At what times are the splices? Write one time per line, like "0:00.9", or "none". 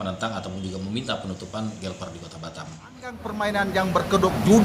0:03.1